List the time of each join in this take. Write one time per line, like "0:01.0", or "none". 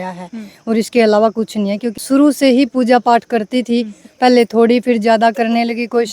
0:02.0